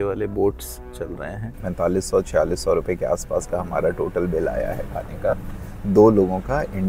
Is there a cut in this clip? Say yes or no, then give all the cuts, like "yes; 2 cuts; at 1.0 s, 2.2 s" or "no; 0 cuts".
yes; 1 cut; at 1.6 s